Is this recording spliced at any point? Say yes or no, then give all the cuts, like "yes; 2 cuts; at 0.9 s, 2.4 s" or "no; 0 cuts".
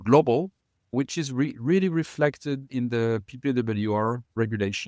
no; 0 cuts